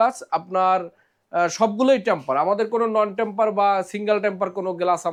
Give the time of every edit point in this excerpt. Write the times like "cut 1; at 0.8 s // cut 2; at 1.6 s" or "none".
none